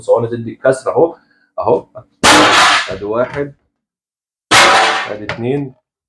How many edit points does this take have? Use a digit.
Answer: 0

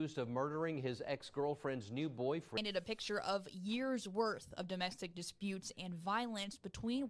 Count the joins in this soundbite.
1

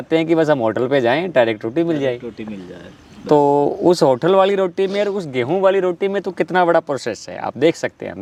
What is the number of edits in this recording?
0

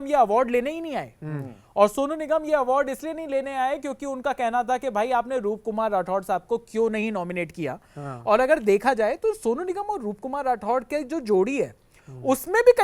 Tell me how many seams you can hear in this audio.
0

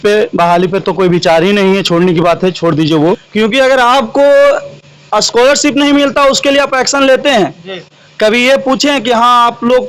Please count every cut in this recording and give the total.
1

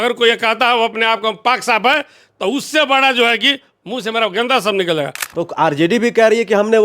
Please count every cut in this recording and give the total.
1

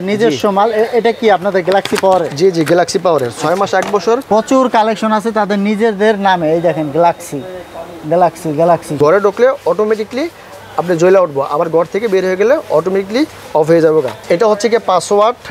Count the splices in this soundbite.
3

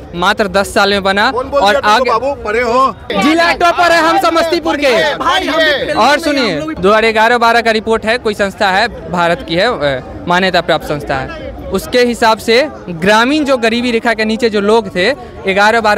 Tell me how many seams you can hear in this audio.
2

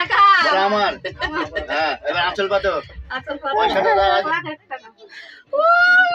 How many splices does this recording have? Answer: 1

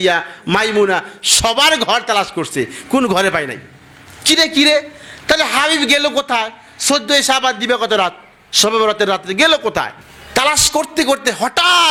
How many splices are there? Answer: 0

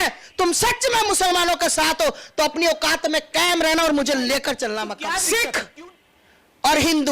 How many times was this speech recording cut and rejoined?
1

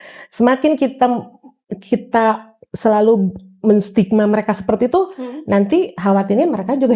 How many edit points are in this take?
0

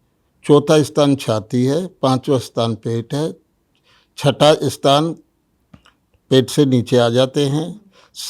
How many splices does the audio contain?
0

